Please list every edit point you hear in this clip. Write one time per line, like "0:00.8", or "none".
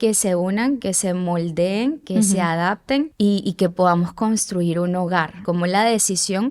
0:03.1
0:05.4